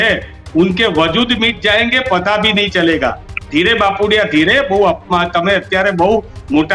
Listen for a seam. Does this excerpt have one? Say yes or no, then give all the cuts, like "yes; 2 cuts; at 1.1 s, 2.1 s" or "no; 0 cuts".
no; 0 cuts